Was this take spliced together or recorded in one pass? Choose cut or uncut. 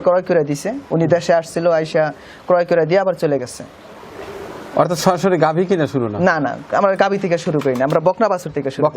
uncut